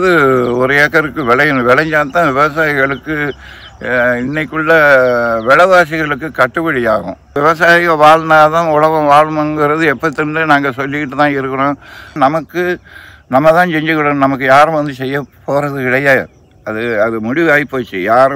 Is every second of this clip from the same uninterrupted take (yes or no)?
no